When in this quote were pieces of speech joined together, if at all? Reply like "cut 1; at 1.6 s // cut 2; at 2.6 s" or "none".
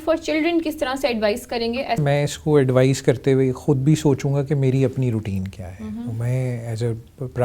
cut 1; at 2.0 s